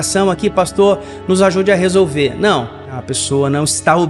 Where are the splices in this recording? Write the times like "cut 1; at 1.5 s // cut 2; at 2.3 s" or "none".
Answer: cut 1; at 2.9 s